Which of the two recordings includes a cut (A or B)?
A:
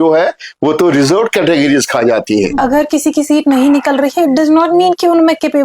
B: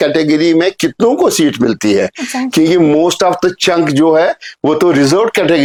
A